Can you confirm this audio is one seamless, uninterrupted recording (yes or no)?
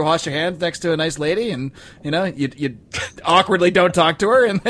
yes